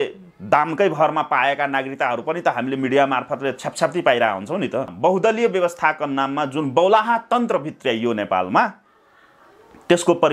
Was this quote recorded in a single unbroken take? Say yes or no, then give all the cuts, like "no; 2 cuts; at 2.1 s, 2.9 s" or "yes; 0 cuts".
no; 1 cut; at 4.9 s